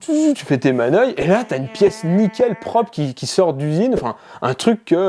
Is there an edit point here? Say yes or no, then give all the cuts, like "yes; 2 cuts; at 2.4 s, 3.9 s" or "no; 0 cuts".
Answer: no; 0 cuts